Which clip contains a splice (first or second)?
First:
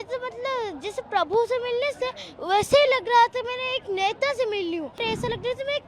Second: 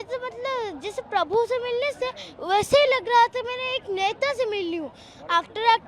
first